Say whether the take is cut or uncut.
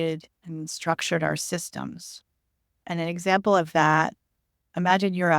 uncut